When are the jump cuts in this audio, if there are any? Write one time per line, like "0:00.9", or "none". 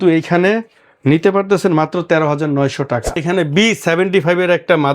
0:03.2